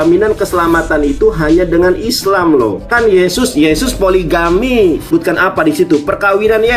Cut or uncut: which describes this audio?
cut